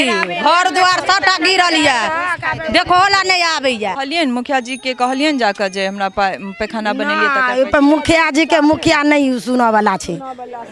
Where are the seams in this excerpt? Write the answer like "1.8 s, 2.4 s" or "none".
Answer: 4.0 s

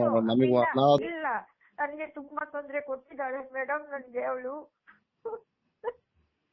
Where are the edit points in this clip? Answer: 1.0 s

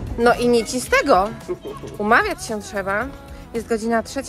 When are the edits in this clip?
none

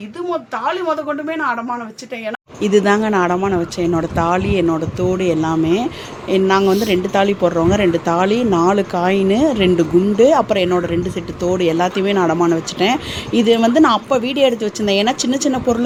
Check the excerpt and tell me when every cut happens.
none

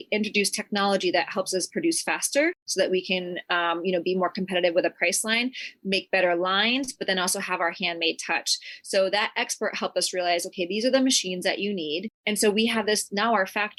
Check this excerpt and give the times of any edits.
none

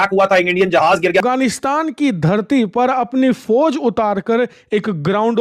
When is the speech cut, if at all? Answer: 1.2 s

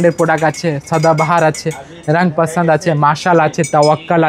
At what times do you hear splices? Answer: none

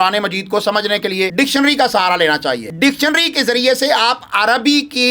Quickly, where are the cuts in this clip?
1.3 s, 2.7 s

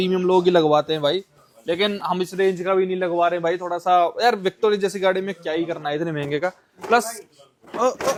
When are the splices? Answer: none

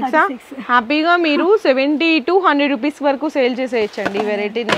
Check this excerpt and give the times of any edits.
none

